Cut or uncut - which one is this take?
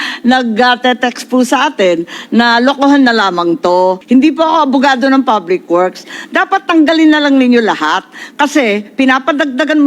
cut